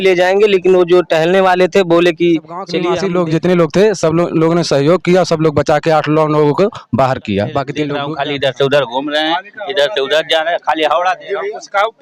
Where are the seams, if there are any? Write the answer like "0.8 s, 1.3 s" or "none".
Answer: 2.8 s, 8.0 s